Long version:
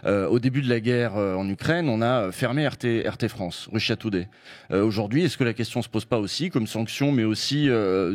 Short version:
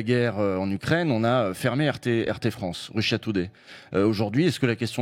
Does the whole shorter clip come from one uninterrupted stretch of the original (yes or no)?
yes